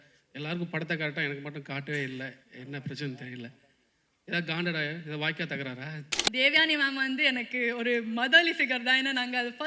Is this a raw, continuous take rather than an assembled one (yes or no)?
no